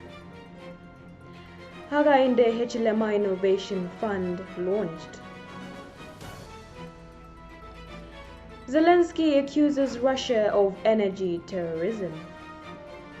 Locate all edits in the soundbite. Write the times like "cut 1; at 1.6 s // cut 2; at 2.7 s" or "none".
cut 1; at 1.9 s // cut 2; at 5.0 s // cut 3; at 6.5 s // cut 4; at 8.7 s // cut 5; at 12.2 s